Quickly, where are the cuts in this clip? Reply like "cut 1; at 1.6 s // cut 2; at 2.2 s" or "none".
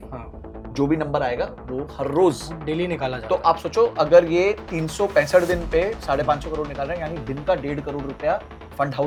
none